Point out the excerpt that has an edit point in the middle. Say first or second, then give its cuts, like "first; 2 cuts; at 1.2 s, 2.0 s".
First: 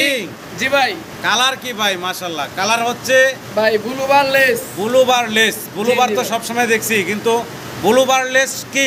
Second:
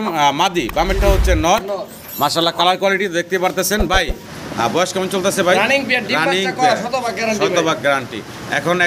second; 1 cut; at 4.3 s